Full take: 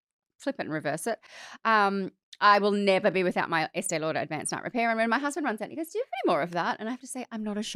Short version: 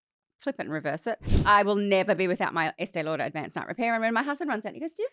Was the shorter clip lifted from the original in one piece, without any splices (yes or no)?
no